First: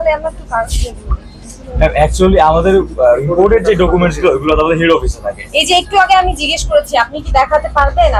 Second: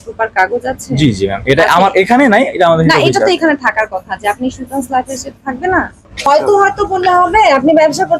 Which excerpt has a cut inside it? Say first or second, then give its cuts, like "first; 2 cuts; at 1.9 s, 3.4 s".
second; 1 cut; at 6.0 s